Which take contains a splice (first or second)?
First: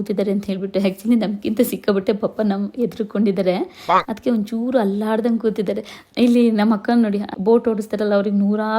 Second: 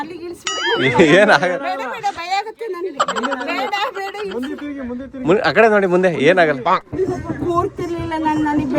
first